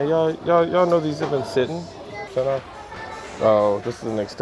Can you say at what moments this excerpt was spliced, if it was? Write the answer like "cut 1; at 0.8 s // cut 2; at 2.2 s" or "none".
cut 1; at 2.3 s